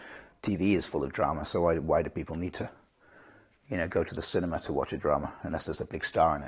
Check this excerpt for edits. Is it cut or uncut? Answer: uncut